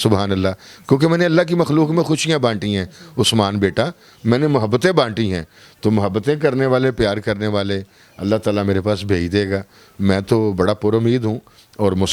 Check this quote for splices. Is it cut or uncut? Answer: uncut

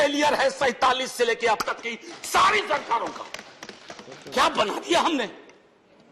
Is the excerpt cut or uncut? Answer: uncut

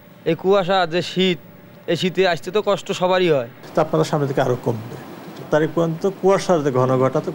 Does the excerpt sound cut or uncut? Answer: cut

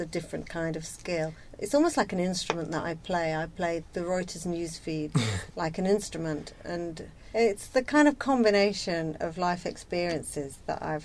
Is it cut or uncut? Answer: cut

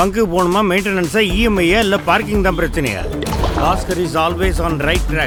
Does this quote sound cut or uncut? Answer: uncut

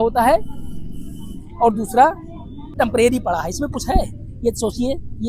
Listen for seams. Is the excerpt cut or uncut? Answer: cut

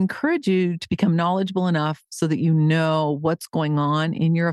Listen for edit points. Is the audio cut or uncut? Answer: uncut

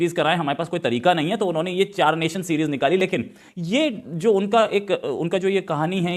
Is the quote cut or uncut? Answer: uncut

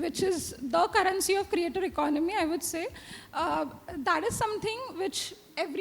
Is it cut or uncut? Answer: uncut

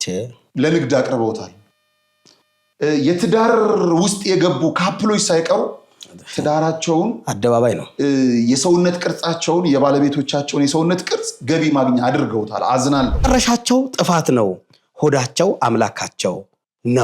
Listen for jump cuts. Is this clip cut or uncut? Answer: cut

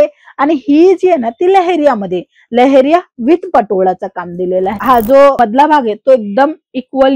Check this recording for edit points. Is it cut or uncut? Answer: cut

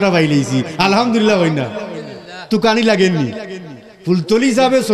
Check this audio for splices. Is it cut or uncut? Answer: uncut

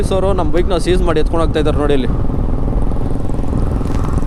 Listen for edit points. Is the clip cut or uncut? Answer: uncut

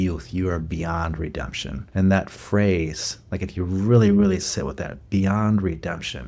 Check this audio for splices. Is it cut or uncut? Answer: cut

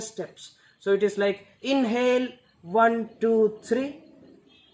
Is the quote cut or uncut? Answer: uncut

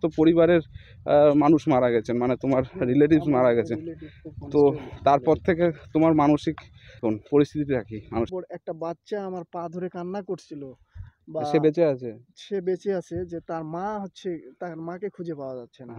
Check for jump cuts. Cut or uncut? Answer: cut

